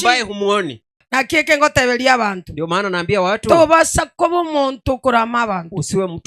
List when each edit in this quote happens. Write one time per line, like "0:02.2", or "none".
0:01.0

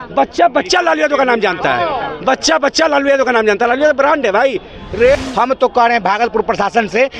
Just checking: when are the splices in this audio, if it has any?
0:05.2

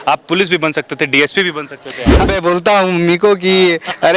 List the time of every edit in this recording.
0:02.3

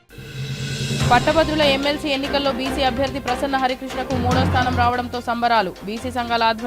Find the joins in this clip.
0:01.1

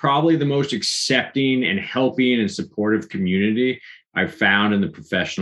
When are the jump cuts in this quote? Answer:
none

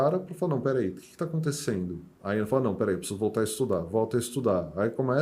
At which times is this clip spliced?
0:02.1

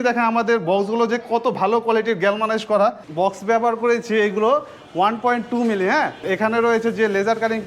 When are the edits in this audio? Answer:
0:03.0
0:06.2

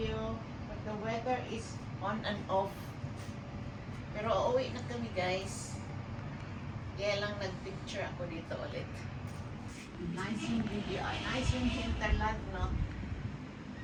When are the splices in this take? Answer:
none

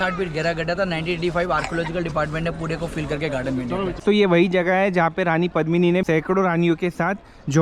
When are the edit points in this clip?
0:04.0
0:06.0

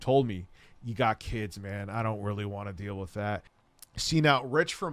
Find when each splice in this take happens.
0:03.5

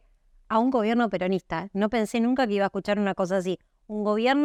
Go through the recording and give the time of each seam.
none

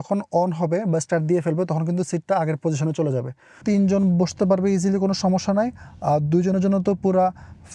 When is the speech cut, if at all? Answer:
0:03.5

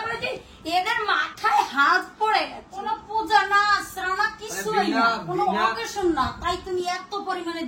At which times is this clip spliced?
none

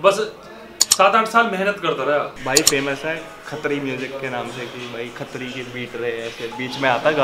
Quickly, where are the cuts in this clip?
0:02.4

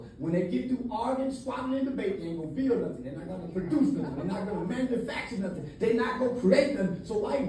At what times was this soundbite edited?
none

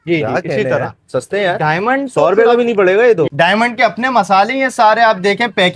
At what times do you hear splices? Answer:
0:03.3

